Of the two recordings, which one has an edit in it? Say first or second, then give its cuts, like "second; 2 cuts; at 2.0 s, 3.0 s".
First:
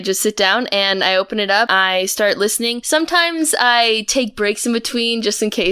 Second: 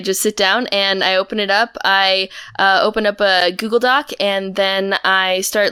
first; 2 cuts; at 1.7 s, 2.8 s